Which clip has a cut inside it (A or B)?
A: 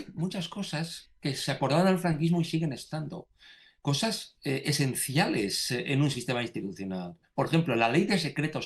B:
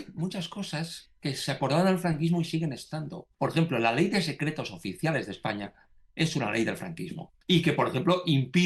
B